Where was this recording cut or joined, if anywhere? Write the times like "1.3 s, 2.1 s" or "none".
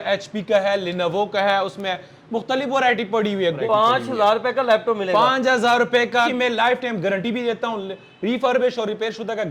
3.6 s, 6.3 s